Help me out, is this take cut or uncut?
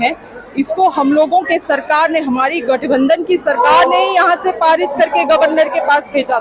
uncut